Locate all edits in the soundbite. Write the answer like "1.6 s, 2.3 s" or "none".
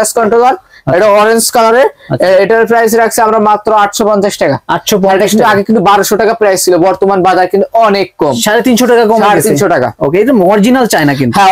none